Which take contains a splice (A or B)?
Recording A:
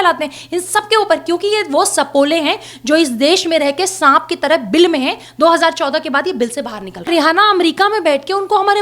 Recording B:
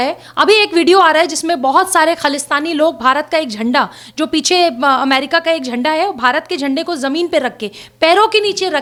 A